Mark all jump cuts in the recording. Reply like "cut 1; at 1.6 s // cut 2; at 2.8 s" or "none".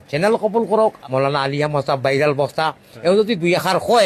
cut 1; at 1.0 s